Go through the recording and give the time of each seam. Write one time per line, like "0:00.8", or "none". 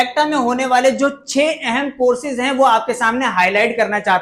none

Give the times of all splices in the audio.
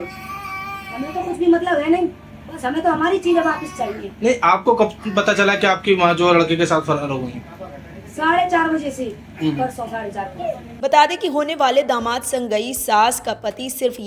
none

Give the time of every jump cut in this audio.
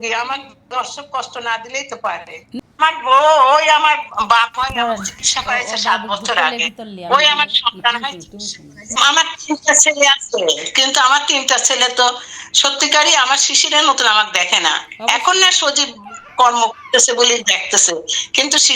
0:02.6
0:09.0

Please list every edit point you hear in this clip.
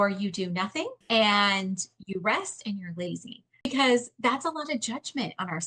0:01.0
0:03.7

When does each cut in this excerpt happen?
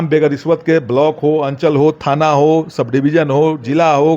none

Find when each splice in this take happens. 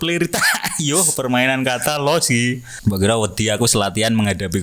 0:02.7

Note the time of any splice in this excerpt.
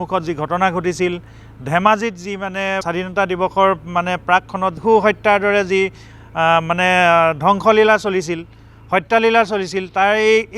0:02.8
0:04.8

